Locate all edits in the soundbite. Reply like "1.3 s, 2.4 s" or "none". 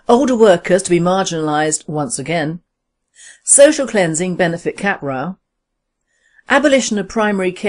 4.5 s